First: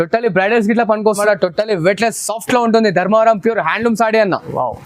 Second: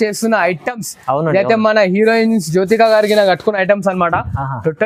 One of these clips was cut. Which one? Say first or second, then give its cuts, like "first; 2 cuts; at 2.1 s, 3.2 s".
first; 1 cut; at 1.2 s